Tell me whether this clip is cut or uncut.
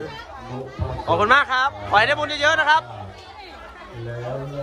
uncut